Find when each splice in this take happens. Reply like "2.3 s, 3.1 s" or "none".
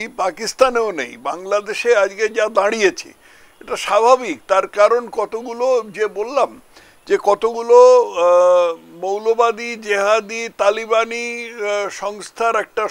none